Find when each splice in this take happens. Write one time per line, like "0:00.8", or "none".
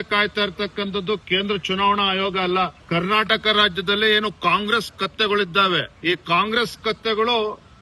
0:02.8
0:05.9